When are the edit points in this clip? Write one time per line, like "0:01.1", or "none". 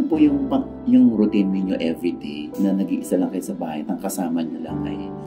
none